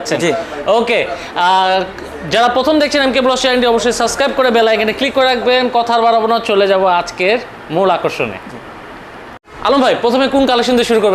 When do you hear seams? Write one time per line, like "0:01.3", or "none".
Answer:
none

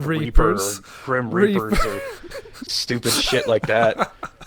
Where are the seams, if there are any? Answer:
none

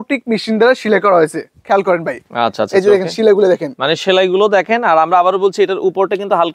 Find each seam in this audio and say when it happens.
none

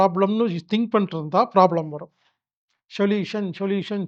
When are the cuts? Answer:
none

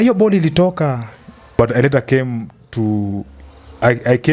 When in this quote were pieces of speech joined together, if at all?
0:01.6

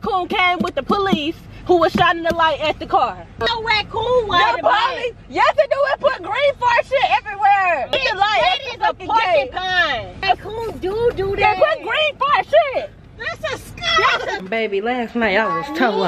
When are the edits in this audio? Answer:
0:03.4
0:07.9
0:10.2
0:14.4

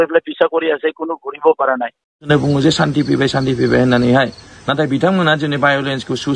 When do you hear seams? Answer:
0:02.2

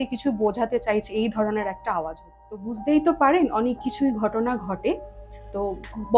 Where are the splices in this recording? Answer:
0:02.7

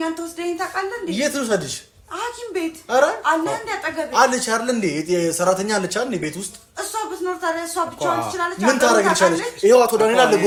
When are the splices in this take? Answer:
none

